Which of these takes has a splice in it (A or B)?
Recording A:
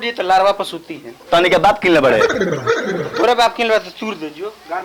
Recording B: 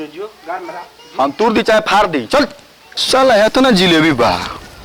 B